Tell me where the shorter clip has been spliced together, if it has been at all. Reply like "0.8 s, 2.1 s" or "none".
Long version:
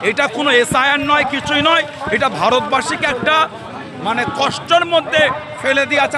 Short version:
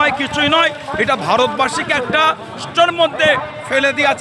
2.7 s